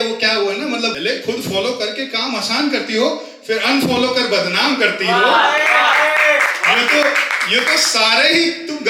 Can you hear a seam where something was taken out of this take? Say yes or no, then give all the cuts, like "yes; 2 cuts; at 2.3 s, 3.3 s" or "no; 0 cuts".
yes; 1 cut; at 0.9 s